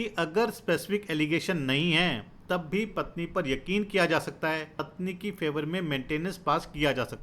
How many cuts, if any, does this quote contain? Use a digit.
1